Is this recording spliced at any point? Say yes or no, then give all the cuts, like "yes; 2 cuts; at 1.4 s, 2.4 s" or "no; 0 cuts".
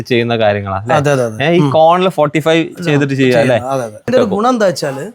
yes; 1 cut; at 4.1 s